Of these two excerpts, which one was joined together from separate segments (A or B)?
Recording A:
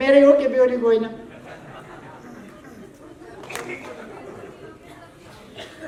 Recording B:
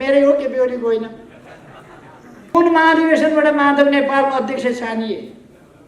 B